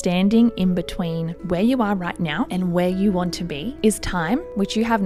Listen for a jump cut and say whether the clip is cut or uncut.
uncut